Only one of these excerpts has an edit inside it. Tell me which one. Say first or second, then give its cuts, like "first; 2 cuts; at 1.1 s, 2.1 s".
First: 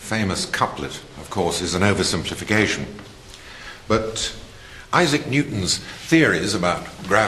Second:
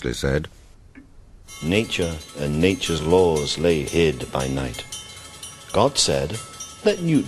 second; 1 cut; at 2.6 s